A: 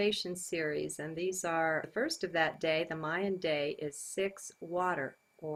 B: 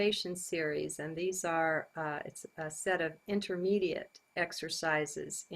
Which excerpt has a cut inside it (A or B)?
B